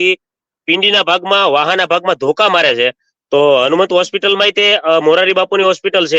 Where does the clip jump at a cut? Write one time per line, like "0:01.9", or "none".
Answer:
0:03.1